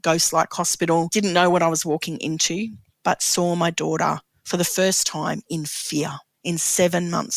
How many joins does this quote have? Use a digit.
3